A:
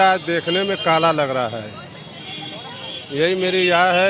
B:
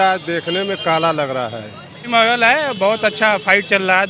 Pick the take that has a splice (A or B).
B